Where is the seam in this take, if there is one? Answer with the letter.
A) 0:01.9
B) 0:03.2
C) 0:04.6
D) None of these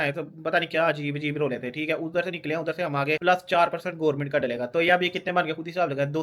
B